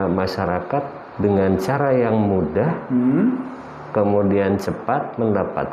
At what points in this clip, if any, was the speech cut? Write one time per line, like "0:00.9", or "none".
none